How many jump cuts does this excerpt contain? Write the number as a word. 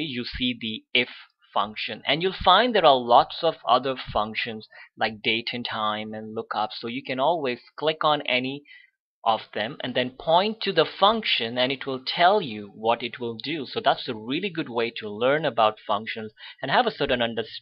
one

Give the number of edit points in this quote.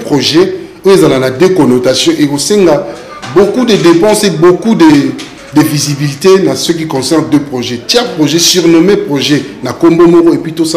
zero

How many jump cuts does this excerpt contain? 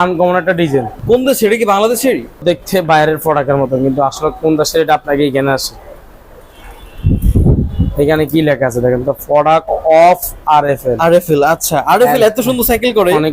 two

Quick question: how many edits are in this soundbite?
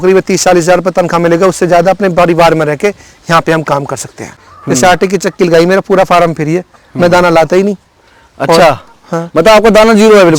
one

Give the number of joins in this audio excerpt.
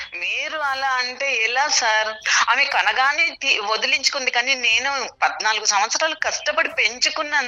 one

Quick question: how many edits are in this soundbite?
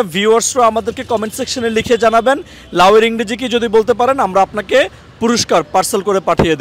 zero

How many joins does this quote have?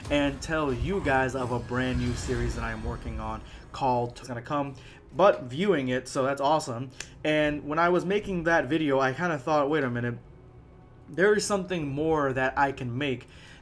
zero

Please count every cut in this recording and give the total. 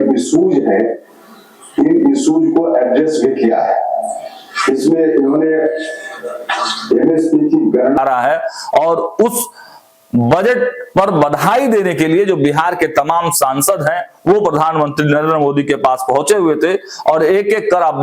one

